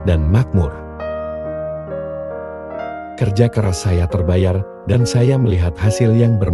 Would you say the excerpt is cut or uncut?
uncut